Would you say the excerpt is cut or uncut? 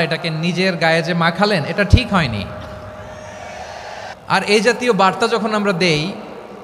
cut